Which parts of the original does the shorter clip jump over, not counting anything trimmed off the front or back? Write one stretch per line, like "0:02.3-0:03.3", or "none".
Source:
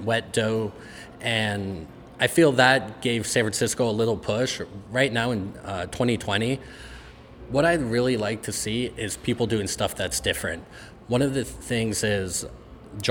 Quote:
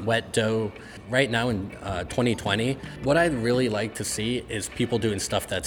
0:00.9-0:04.7
0:06.7-0:07.4